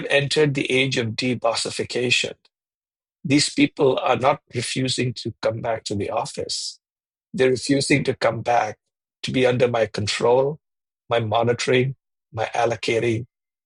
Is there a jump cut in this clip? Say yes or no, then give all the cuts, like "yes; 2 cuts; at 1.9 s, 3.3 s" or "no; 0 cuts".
no; 0 cuts